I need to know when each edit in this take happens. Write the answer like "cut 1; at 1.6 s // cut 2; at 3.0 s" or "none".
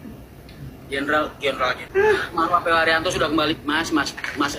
cut 1; at 1.8 s